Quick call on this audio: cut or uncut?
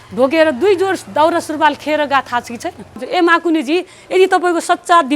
cut